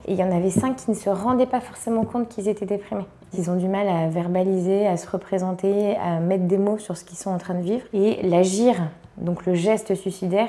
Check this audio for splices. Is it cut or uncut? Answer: cut